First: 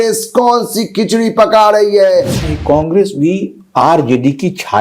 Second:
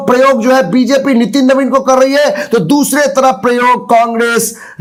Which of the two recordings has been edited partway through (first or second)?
first